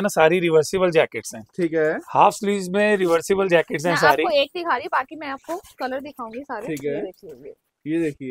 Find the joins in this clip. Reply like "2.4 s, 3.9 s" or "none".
none